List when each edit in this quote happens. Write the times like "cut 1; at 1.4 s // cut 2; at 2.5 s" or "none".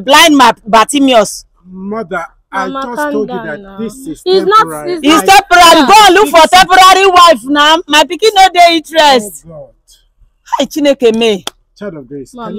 none